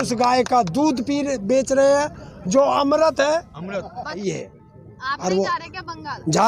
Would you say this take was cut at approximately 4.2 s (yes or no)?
yes